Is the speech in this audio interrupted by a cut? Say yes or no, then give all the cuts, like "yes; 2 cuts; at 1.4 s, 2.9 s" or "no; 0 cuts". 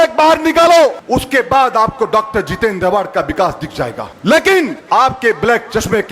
yes; 3 cuts; at 1.0 s, 4.1 s, 4.8 s